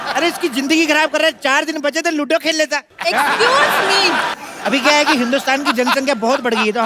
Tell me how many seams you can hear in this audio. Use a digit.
1